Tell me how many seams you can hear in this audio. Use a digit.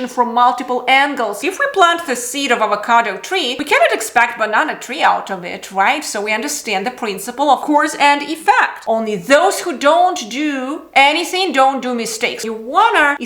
3